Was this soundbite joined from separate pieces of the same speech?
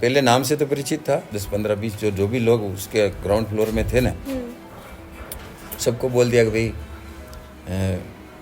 yes; 1 cut; at 1.3 s

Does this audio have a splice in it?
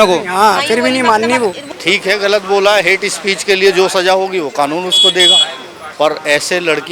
yes; 1 cut; at 1.6 s

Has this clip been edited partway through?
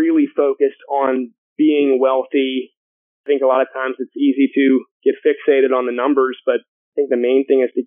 yes; 4 cuts; at 1.4 s, 3.1 s, 4.9 s, 6.8 s

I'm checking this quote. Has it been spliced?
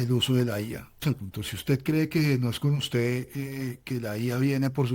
yes; 1 cut; at 1.0 s

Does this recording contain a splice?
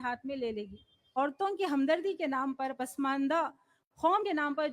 yes; 1 cut; at 1.2 s

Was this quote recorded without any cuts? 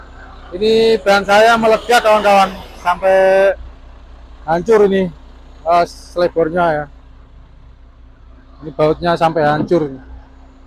yes; 0 cuts

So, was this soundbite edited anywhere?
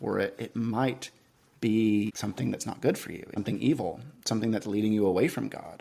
yes; 2 cuts; at 2.2 s, 3.3 s

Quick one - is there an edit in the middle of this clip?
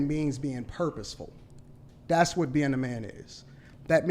no; 0 cuts

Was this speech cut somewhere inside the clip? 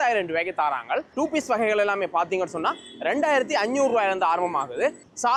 no; 0 cuts

